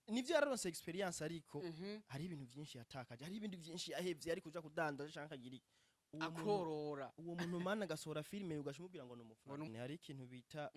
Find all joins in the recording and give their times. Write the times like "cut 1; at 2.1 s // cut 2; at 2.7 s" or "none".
cut 1; at 9.7 s